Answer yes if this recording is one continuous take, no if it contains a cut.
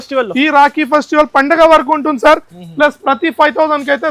yes